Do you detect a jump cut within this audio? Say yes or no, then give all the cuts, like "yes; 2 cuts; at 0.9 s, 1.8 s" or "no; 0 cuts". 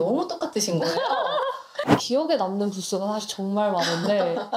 yes; 1 cut; at 1.8 s